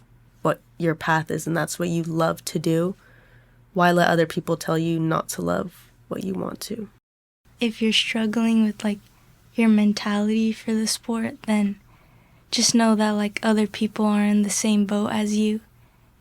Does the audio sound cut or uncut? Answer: cut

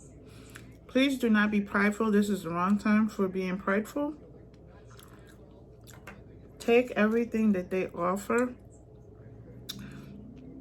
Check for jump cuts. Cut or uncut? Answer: uncut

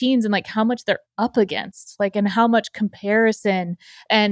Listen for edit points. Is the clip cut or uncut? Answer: uncut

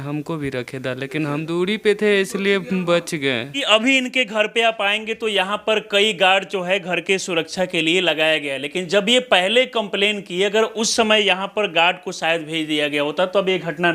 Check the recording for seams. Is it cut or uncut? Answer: cut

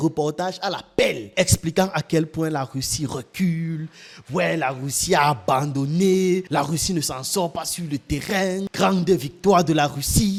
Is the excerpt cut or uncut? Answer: uncut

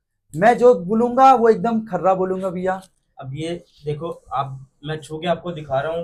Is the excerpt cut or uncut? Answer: uncut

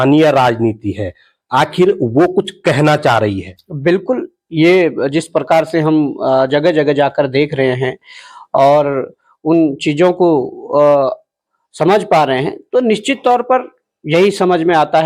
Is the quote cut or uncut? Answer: uncut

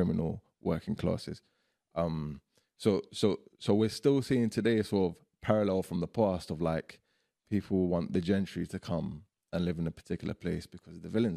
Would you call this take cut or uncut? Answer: uncut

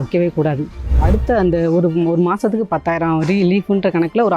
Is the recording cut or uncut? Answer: cut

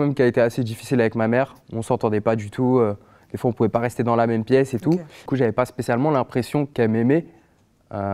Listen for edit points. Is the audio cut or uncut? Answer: cut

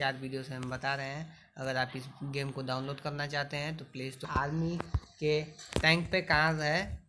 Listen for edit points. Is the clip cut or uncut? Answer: cut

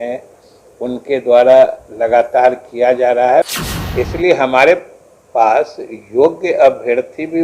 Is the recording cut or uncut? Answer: cut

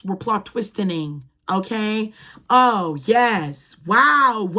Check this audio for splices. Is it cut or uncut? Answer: uncut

